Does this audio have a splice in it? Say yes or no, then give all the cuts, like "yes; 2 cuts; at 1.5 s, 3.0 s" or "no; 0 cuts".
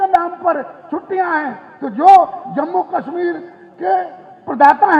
no; 0 cuts